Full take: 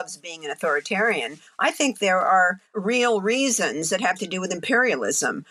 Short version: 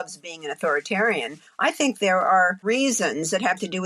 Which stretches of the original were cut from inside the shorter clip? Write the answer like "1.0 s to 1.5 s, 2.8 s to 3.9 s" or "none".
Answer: 2.6 s to 3.2 s

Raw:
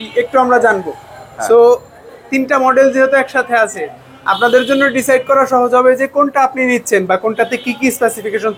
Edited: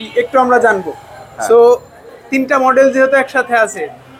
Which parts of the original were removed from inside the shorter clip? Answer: none

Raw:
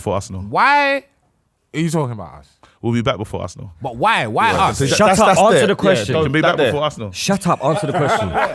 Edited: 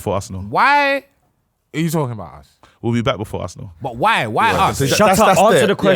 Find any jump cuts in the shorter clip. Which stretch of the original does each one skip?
none

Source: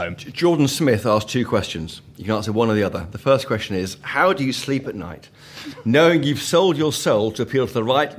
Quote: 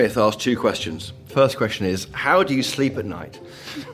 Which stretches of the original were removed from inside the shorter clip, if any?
2.1 s to 3.1 s

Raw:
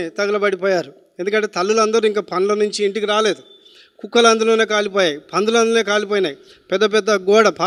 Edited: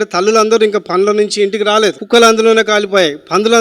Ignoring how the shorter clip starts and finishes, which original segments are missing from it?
3.4 s to 4.0 s

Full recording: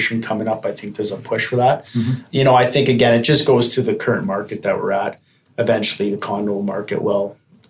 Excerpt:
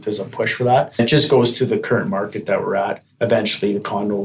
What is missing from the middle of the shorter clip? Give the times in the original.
1.9 s to 3.2 s, 5.2 s to 5.4 s

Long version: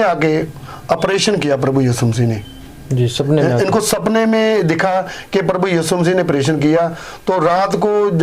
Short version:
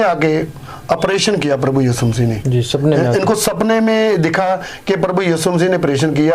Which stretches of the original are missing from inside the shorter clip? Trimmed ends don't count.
2.4 s to 2.9 s

